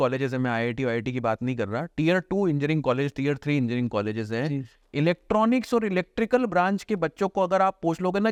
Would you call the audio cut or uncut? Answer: uncut